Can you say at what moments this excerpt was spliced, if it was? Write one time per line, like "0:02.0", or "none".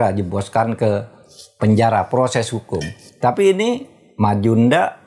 none